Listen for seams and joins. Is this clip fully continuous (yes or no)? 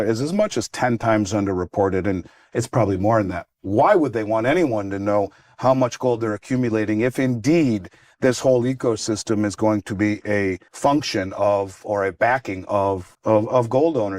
no